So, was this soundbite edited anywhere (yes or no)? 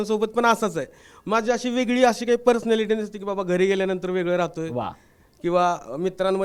no